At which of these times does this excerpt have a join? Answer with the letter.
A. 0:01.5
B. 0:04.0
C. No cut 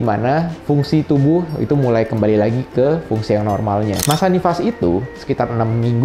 B